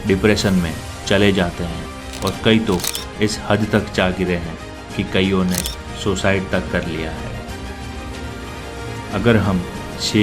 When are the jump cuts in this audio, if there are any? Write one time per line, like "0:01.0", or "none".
none